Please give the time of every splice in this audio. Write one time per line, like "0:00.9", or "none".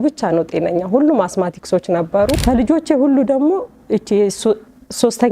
0:02.4